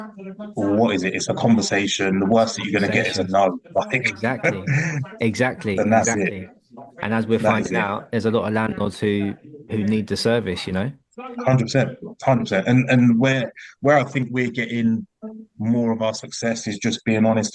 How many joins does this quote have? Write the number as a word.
zero